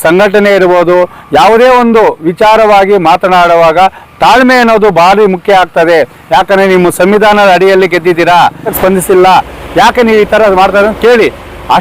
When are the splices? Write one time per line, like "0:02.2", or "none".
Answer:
0:08.7